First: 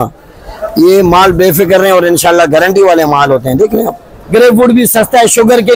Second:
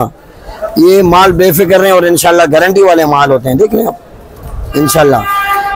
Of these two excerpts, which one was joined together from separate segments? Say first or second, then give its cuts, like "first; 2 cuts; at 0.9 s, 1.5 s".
first; 1 cut; at 4.1 s